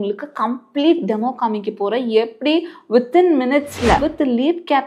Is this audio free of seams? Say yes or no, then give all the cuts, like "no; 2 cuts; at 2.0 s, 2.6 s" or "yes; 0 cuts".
yes; 0 cuts